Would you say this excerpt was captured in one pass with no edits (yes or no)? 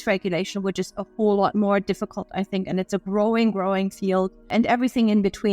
no